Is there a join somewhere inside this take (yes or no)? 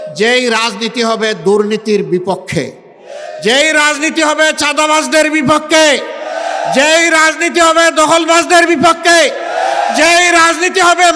no